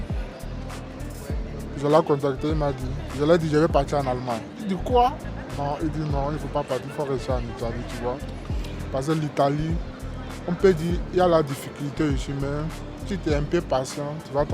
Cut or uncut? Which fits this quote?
uncut